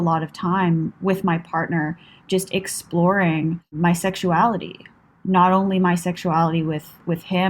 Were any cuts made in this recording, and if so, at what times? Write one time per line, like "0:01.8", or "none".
0:00.9
0:03.7